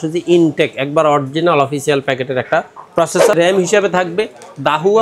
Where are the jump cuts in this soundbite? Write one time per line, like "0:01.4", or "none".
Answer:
0:03.3